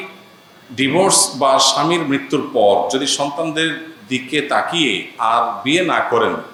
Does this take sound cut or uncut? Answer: uncut